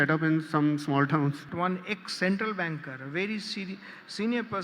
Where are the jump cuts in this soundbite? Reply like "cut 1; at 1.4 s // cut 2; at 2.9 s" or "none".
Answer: cut 1; at 1.5 s